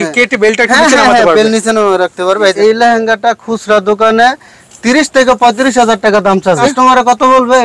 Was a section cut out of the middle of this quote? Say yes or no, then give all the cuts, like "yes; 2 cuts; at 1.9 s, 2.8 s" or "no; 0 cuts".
yes; 2 cuts; at 2.6 s, 6.6 s